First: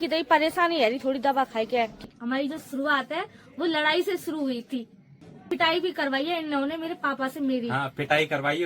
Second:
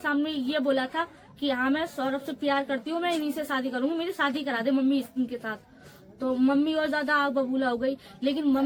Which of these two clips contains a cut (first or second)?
first